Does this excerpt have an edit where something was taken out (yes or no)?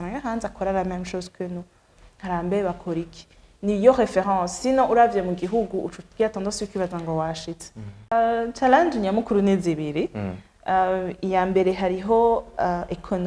yes